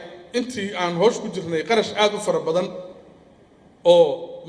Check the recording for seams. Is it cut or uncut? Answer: uncut